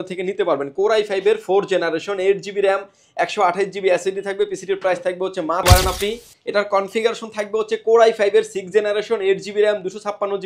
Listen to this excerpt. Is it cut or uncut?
cut